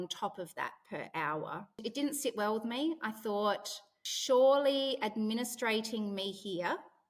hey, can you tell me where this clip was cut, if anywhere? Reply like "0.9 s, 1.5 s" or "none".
1.8 s